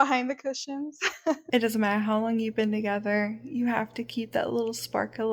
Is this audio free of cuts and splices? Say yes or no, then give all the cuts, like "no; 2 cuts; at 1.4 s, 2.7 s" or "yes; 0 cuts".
no; 1 cut; at 1.4 s